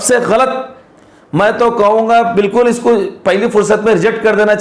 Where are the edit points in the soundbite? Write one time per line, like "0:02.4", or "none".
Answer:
none